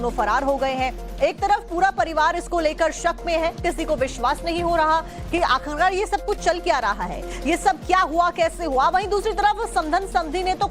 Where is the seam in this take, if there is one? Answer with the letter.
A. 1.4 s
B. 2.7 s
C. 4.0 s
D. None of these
B